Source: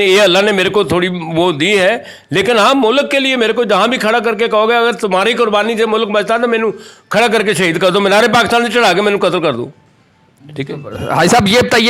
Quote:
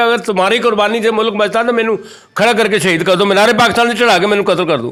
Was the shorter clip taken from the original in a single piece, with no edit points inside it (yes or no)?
yes